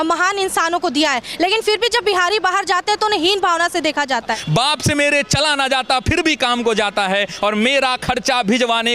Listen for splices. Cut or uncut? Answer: cut